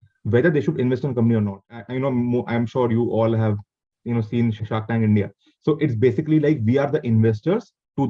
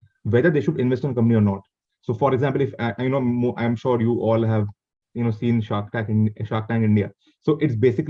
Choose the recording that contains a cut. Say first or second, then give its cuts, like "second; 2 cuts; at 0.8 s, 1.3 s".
first; 2 cuts; at 1.8 s, 4.6 s